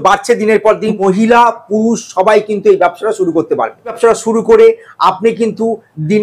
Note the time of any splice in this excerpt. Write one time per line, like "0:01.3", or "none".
0:01.0
0:04.0